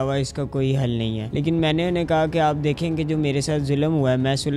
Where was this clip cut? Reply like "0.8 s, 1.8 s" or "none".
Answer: 1.2 s